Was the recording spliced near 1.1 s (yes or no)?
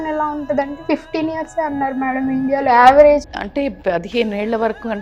no